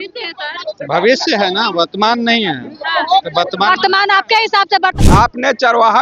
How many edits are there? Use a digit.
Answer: 1